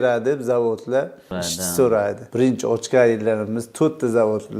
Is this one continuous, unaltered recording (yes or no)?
no